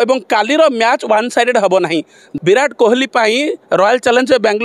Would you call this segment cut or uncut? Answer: cut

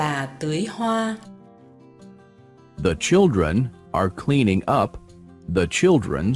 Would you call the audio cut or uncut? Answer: cut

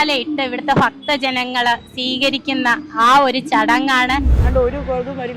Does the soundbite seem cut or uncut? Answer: cut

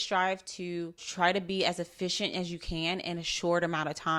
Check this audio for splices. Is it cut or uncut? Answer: cut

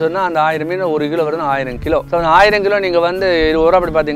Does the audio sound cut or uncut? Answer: cut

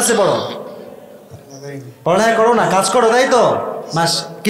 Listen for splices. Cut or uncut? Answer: uncut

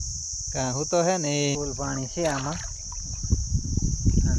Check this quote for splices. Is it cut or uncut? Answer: cut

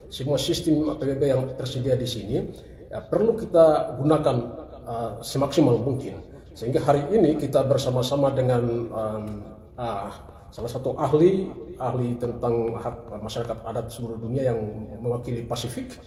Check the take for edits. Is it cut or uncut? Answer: uncut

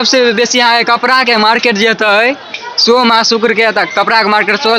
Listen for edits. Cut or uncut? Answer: uncut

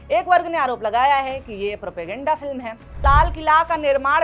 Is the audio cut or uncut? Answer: cut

